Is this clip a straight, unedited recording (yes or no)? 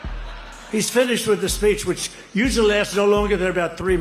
yes